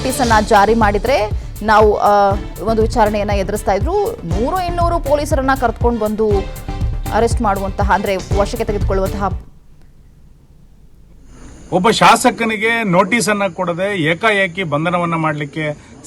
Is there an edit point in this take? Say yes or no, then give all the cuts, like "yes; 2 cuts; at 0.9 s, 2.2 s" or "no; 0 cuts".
yes; 1 cut; at 10.8 s